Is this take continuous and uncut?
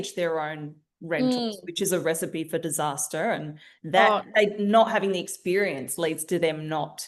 yes; 0 cuts

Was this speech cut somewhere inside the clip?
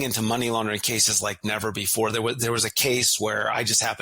no; 0 cuts

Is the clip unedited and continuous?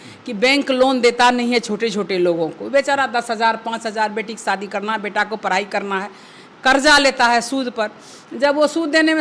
yes; 0 cuts

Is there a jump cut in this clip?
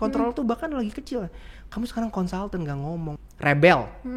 yes; 1 cut; at 3.2 s

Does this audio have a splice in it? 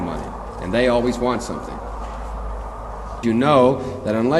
yes; 1 cut; at 3.2 s

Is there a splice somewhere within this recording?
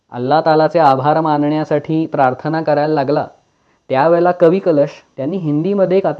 yes; 1 cut; at 5.1 s

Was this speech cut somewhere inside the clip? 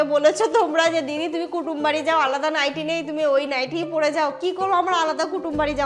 no; 0 cuts

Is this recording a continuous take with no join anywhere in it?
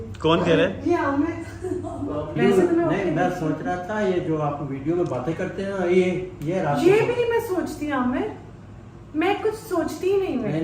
no; 1 cut; at 2.4 s

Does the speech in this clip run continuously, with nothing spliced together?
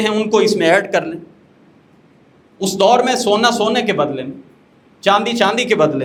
yes; 0 cuts

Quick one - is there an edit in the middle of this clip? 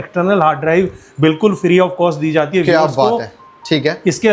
no; 0 cuts

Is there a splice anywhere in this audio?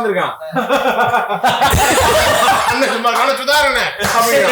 no; 0 cuts

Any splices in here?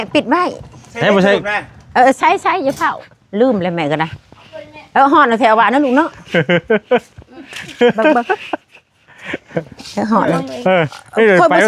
no; 0 cuts

